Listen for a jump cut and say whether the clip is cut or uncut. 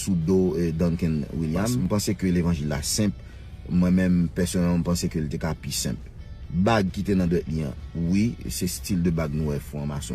cut